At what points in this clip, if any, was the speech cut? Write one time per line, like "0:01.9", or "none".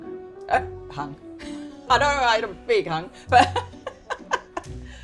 none